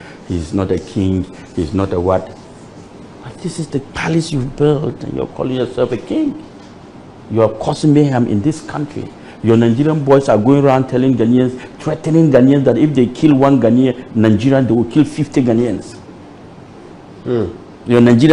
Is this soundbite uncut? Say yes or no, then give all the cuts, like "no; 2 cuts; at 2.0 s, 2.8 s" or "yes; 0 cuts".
yes; 0 cuts